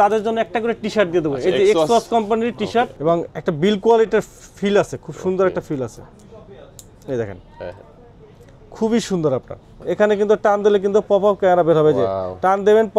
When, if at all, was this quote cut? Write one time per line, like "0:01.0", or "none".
0:02.9
0:09.8